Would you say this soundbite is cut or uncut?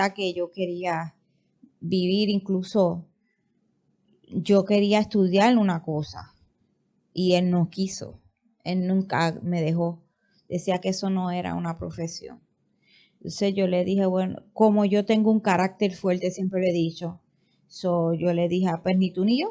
uncut